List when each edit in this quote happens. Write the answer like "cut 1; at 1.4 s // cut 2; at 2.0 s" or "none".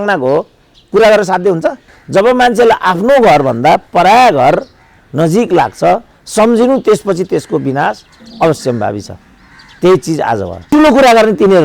cut 1; at 1.9 s // cut 2; at 10.7 s

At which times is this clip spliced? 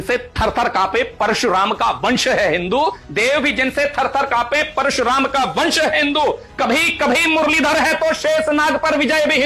none

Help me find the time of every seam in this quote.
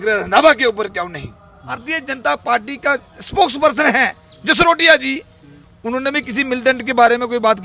cut 1; at 1.8 s

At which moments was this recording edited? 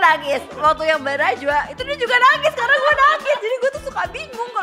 none

